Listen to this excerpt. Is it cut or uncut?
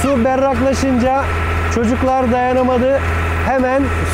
uncut